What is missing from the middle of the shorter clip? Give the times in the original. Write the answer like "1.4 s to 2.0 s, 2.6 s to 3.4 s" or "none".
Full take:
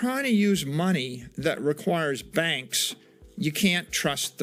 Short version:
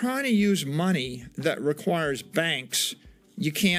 none